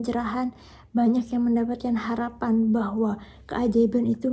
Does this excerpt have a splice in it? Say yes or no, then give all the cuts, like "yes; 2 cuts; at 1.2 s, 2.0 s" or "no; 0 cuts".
no; 0 cuts